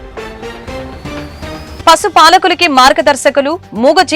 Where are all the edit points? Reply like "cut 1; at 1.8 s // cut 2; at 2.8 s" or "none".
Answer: cut 1; at 1.7 s